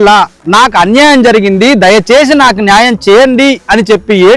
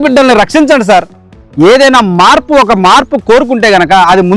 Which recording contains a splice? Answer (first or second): second